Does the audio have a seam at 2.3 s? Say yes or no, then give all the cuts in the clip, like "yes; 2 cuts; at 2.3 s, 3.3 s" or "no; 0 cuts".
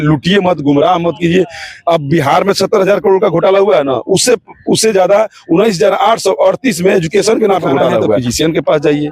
no; 1 cut; at 8.2 s